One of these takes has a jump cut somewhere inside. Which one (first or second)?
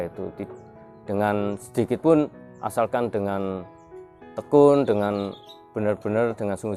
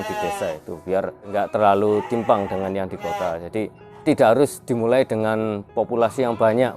second